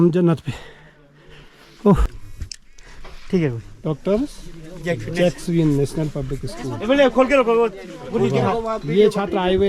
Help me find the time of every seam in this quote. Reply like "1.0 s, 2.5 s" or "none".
2.1 s